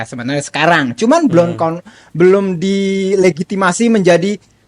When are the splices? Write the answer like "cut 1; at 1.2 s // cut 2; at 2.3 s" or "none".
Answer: none